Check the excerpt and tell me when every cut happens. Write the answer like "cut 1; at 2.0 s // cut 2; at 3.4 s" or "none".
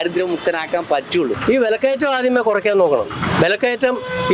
cut 1; at 1.4 s